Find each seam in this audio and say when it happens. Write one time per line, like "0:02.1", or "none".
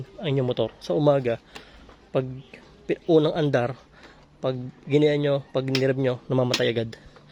none